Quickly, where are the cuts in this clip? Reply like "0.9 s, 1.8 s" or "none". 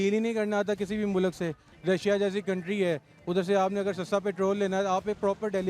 1.7 s